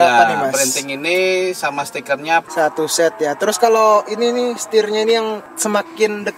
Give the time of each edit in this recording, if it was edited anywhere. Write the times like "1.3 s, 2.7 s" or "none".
2.5 s